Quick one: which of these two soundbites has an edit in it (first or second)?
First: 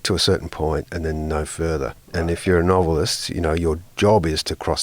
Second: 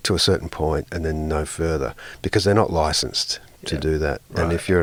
first